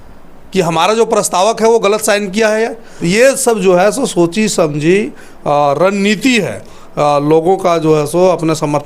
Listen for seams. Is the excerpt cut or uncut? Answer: cut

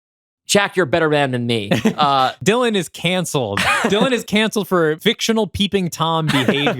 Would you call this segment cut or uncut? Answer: cut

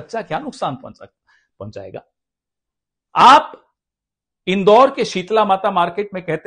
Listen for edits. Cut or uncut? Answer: uncut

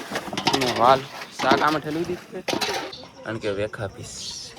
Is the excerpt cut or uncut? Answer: cut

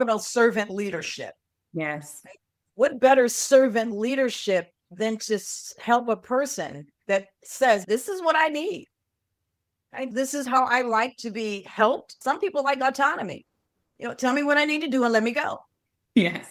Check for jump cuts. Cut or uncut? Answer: uncut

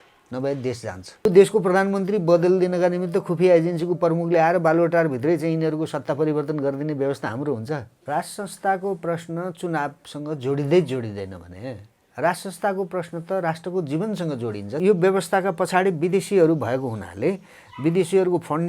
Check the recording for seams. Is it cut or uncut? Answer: cut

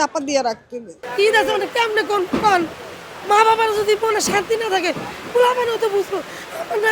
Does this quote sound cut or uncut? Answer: cut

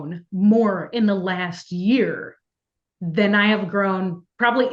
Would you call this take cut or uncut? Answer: uncut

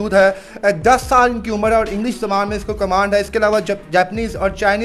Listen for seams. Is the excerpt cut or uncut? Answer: uncut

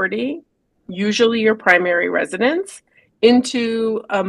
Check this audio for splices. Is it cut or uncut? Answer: uncut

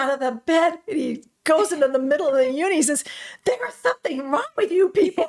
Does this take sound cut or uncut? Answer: uncut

